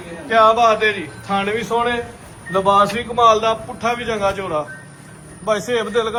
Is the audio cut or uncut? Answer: uncut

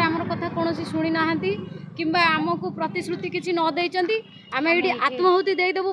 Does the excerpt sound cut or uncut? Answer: uncut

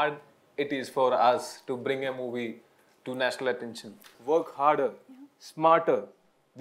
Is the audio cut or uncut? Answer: cut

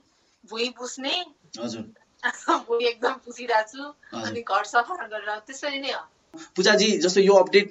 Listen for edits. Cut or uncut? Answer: cut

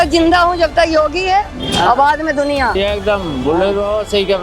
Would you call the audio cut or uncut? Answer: cut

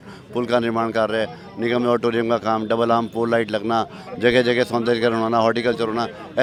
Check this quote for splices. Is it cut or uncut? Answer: uncut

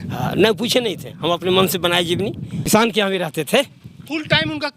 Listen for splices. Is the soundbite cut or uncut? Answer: cut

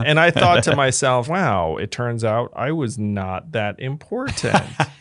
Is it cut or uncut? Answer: cut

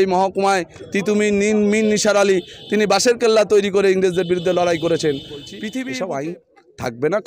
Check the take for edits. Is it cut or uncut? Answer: cut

